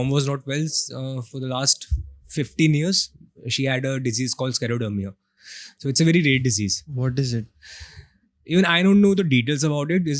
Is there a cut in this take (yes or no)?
no